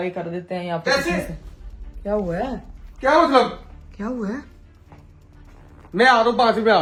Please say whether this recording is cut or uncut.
uncut